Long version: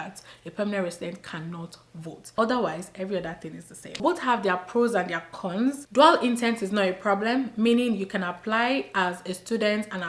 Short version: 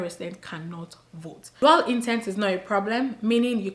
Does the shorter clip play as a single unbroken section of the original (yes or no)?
no